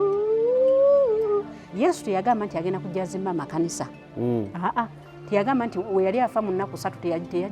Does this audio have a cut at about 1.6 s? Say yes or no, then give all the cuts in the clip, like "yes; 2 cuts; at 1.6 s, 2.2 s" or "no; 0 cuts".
yes; 1 cut; at 1.6 s